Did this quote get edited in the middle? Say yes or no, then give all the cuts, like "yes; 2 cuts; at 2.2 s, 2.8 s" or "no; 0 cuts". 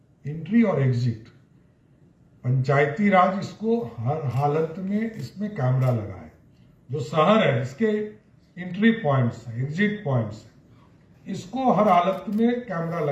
no; 0 cuts